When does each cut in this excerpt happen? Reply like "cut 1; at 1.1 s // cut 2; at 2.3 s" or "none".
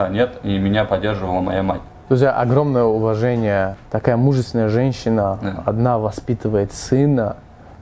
none